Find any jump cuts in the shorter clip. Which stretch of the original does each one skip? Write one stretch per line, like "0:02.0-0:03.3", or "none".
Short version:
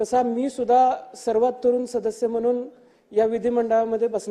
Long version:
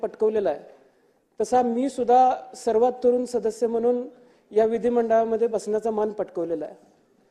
none